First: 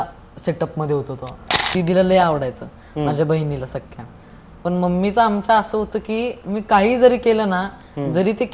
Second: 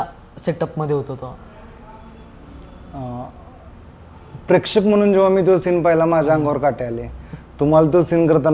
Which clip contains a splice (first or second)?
first